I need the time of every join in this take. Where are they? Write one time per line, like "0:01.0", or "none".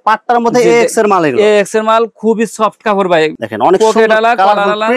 0:03.4